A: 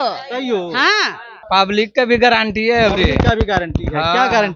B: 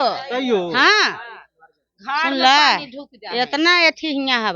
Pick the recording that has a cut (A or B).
A